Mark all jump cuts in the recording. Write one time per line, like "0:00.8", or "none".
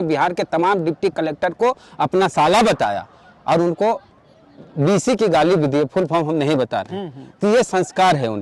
none